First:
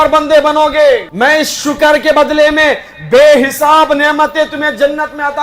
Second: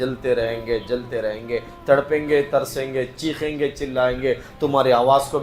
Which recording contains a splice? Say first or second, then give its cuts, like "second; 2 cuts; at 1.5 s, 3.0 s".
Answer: first; 1 cut; at 1.1 s